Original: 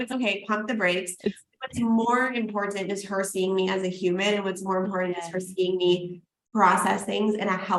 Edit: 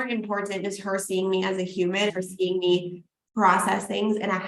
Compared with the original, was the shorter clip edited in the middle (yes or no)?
yes